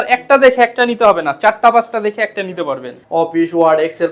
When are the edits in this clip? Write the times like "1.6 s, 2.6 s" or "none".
2.9 s